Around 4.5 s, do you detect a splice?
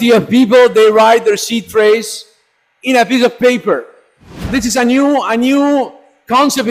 yes; 1 cut; at 4.5 s

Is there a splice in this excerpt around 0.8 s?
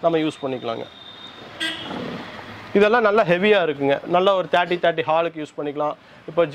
no; 0 cuts

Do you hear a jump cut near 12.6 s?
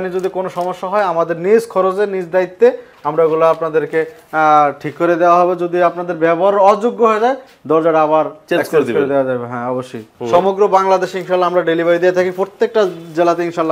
no; 1 cut; at 10.0 s

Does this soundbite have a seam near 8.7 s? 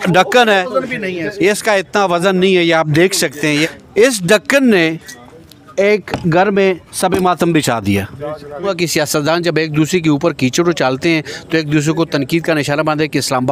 yes; 2 cuts; at 3.8 s, 8.7 s

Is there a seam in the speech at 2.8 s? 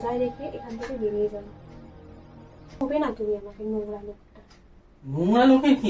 yes; 1 cut; at 2.8 s

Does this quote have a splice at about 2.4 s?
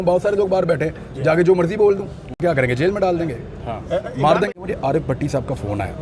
yes; 2 cuts; at 2.4 s, 4.5 s

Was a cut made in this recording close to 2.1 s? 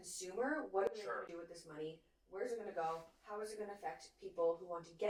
no; 0 cuts

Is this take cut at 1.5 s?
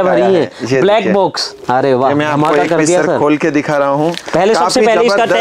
yes; 1 cut; at 1.5 s

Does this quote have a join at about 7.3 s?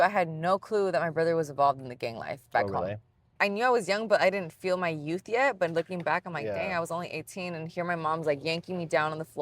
no; 1 cut; at 3.4 s

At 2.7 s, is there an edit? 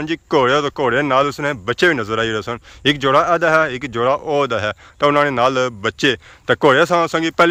no; 0 cuts

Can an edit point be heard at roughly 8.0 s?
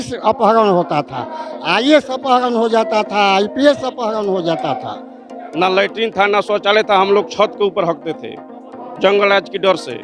no; 1 cut; at 5.4 s

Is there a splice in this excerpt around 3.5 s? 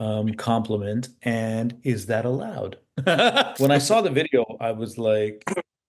yes; 1 cut; at 3.5 s

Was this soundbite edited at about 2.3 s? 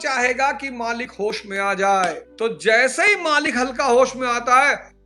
yes; 1 cut; at 2.3 s

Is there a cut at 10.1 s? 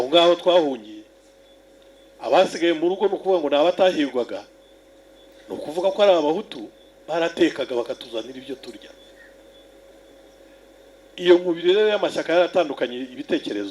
yes; 1 cut; at 10.1 s

